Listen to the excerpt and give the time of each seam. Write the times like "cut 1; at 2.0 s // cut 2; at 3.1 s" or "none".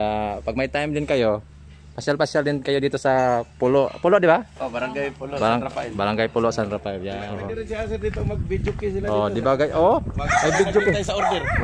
cut 1; at 7.3 s